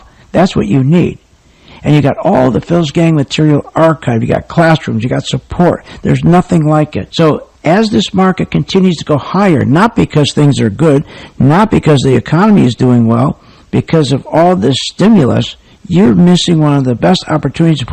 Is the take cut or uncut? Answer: uncut